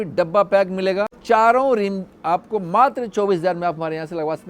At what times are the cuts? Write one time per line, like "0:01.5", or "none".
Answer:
0:01.1